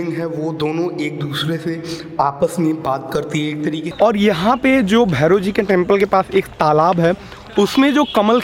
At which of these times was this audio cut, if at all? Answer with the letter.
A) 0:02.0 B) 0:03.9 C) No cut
B